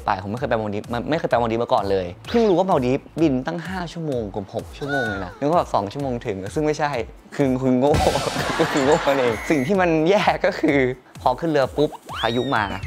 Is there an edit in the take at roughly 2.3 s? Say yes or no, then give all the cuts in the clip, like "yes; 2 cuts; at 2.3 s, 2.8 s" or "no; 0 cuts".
no; 3 cuts; at 5.3 s, 9.4 s, 11.1 s